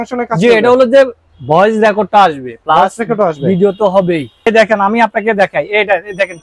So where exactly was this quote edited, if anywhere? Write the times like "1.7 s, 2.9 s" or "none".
4.5 s